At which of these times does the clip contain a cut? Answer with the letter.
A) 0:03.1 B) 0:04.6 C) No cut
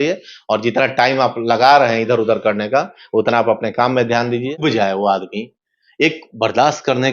B